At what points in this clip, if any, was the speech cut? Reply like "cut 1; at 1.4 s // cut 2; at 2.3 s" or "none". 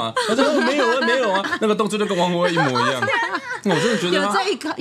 none